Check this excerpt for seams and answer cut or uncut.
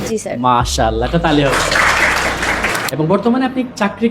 cut